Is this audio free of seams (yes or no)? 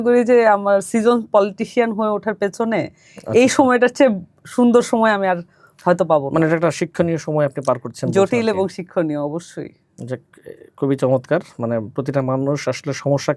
yes